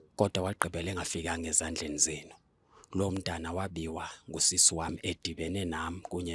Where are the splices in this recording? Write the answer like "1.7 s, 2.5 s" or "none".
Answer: none